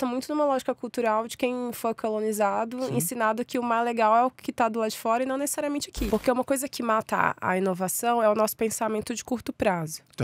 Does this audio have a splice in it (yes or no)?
yes